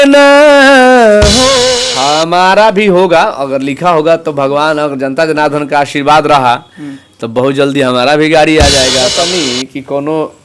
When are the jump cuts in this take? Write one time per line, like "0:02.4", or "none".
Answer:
0:01.7
0:09.1